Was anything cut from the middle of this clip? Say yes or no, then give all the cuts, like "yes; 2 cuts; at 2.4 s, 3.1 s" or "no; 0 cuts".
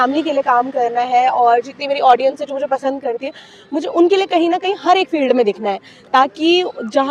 no; 0 cuts